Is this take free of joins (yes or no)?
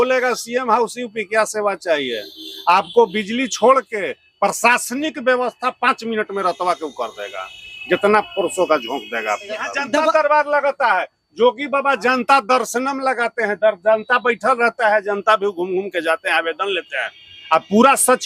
no